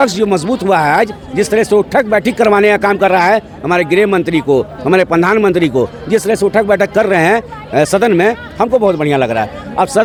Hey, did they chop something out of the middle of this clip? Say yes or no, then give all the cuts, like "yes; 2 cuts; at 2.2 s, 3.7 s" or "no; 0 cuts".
no; 0 cuts